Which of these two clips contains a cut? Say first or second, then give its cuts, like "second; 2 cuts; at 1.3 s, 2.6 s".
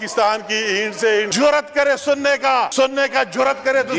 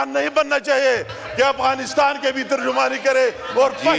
first; 2 cuts; at 1.3 s, 2.7 s